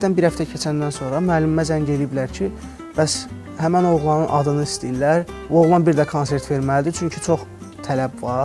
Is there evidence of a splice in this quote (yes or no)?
no